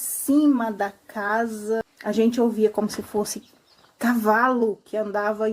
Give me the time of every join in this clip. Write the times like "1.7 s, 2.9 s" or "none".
1.9 s